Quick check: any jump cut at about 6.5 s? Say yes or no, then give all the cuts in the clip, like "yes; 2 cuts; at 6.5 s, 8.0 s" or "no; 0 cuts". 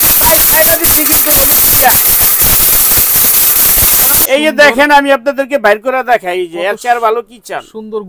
no; 1 cut; at 4.2 s